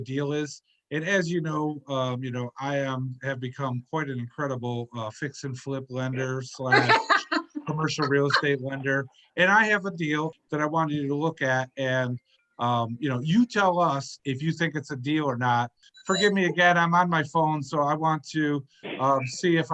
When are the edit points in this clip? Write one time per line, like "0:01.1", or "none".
0:10.3
0:15.9